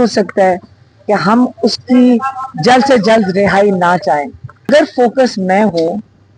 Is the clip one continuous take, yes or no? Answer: no